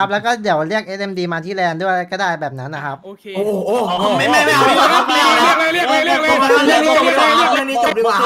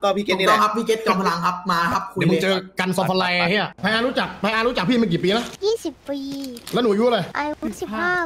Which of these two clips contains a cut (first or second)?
second